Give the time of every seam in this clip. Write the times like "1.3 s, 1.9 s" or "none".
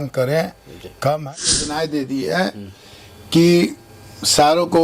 1.5 s